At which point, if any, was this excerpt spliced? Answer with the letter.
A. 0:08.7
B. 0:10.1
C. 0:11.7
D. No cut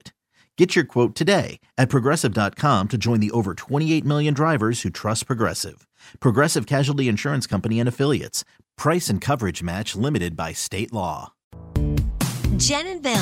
C